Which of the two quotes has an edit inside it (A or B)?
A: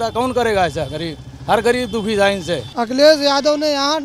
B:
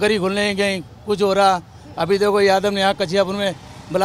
A